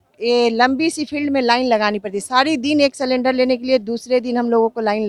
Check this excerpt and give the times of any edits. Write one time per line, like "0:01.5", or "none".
none

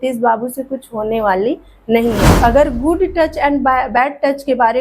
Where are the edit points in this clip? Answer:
0:02.3

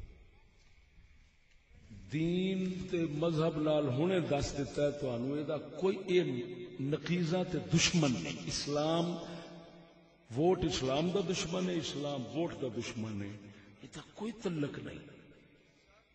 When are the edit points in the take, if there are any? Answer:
none

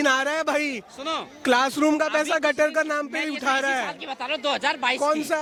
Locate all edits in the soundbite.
none

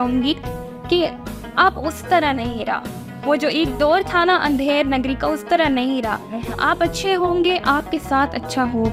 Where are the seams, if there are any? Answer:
none

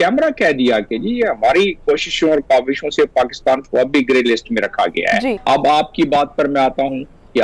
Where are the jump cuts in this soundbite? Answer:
none

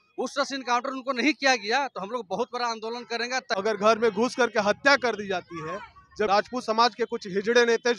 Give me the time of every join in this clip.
0:03.5
0:06.3

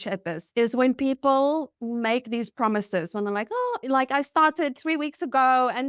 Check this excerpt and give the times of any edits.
0:03.8

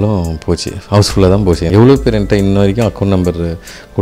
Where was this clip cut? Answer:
0:01.7

